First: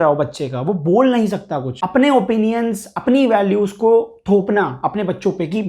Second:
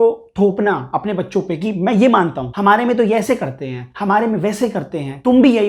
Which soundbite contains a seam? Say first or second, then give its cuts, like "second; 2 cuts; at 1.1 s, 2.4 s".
first; 1 cut; at 1.7 s